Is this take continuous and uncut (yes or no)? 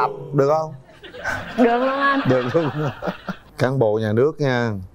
no